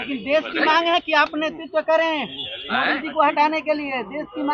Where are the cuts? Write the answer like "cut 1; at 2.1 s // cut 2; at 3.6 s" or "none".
none